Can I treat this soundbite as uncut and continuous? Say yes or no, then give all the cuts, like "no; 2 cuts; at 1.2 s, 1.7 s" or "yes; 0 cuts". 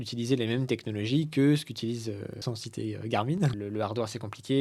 no; 2 cuts; at 2.4 s, 3.5 s